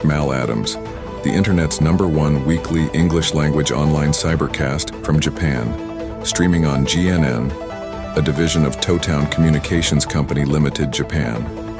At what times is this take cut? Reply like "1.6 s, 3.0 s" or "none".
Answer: 7.7 s